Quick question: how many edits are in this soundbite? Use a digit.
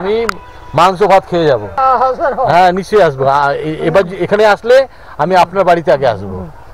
1